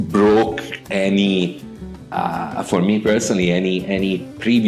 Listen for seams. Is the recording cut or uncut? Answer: uncut